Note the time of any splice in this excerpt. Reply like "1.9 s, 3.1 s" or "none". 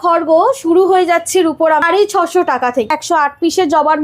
1.8 s, 2.9 s